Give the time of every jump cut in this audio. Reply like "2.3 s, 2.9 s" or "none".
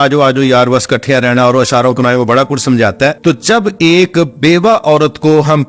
3.2 s